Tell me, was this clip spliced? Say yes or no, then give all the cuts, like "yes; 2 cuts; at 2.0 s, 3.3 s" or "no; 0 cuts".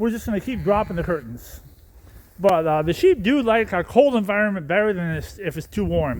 no; 0 cuts